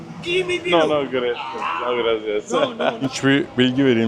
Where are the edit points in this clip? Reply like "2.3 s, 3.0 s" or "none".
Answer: 3.0 s